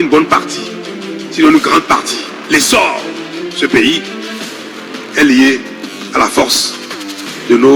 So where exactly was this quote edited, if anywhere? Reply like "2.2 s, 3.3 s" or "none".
none